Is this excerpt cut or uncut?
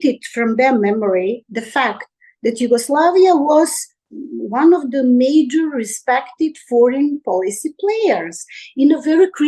uncut